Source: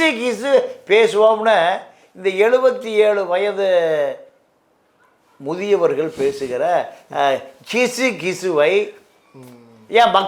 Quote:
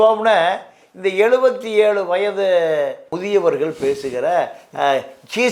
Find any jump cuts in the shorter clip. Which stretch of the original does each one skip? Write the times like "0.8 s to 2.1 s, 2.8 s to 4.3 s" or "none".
4.3 s to 5.4 s